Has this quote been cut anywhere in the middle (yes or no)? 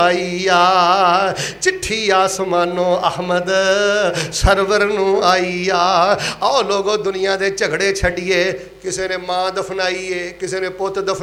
no